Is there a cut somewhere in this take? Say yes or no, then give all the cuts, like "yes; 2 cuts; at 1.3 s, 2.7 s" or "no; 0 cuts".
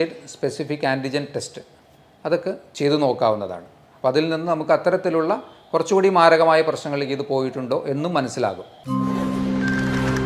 yes; 1 cut; at 8.7 s